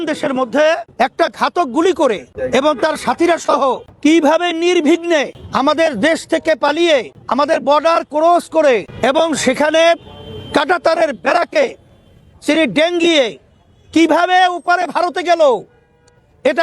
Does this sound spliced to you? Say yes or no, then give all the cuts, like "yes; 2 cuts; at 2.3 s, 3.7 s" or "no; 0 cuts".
yes; 6 cuts; at 0.9 s, 2.3 s, 3.9 s, 5.4 s, 7.2 s, 8.9 s